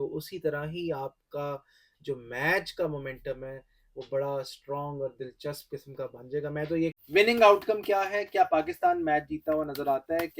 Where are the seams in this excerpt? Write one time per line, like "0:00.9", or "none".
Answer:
0:07.0